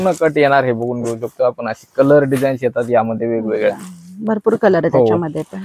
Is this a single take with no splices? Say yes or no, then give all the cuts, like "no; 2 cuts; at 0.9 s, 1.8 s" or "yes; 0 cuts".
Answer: yes; 0 cuts